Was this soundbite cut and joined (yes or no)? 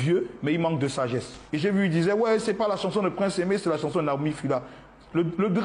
yes